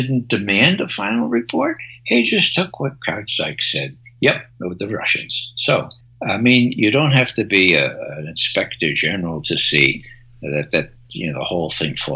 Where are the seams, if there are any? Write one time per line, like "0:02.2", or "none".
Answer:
0:06.0

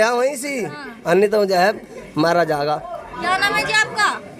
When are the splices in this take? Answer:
0:03.2

